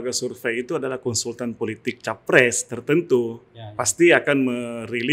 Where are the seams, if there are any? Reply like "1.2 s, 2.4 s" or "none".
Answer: none